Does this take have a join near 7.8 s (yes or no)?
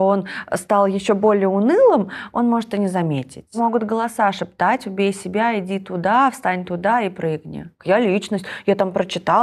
yes